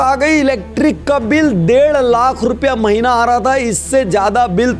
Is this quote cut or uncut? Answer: uncut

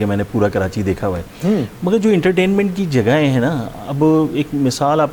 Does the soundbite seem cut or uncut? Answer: uncut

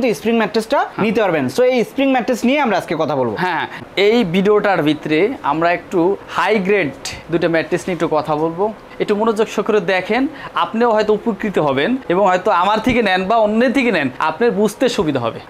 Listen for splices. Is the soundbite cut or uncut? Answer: uncut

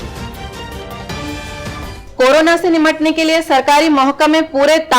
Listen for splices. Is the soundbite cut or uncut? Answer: cut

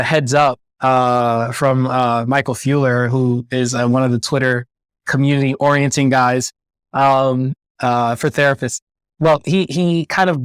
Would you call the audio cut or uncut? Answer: uncut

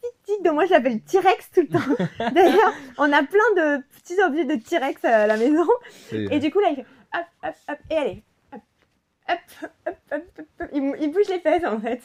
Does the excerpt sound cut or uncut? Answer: uncut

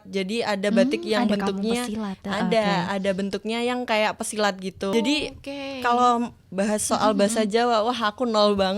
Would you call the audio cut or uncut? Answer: cut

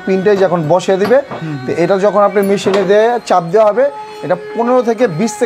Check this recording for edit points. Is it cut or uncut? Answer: uncut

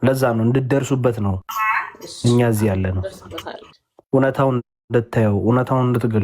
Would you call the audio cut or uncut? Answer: cut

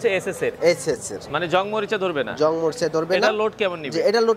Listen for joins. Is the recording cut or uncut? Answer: uncut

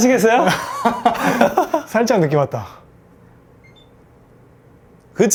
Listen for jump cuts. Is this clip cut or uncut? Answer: uncut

